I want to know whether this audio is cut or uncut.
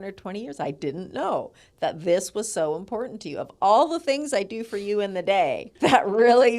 cut